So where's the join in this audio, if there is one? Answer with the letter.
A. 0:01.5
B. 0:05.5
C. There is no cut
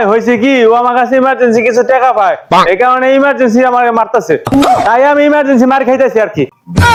C